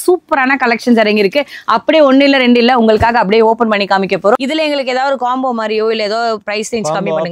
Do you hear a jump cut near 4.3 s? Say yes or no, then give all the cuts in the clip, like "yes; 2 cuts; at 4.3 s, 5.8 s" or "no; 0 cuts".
yes; 1 cut; at 4.3 s